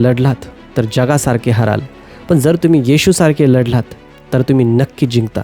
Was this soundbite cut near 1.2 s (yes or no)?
no